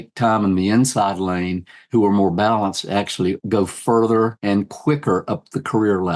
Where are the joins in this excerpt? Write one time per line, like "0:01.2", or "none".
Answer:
0:03.4
0:04.4